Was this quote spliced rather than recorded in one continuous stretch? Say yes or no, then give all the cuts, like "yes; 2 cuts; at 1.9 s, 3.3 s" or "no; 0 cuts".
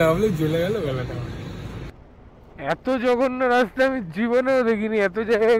yes; 1 cut; at 1.7 s